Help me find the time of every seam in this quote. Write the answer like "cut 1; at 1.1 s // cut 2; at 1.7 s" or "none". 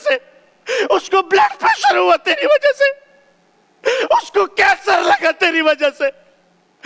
none